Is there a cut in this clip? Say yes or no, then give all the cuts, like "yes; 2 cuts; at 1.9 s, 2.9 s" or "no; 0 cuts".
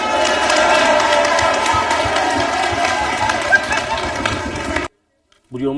yes; 1 cut; at 4.9 s